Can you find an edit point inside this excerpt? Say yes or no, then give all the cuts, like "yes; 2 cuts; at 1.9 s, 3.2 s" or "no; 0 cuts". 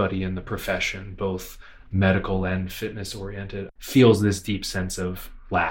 yes; 1 cut; at 3.7 s